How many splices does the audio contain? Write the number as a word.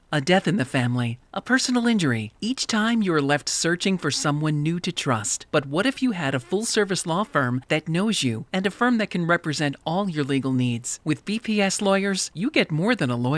zero